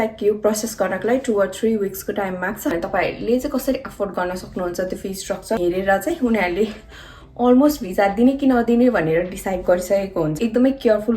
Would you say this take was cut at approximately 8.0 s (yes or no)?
no